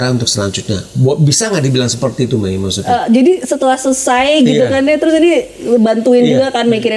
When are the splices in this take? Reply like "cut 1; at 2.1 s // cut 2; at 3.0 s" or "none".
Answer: cut 1; at 2.8 s